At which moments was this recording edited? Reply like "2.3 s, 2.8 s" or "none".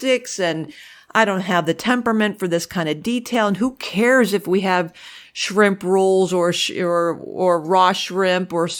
none